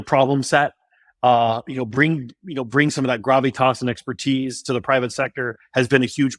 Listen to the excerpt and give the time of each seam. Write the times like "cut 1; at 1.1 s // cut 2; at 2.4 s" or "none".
none